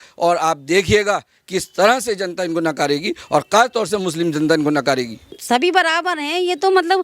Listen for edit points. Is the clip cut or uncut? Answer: cut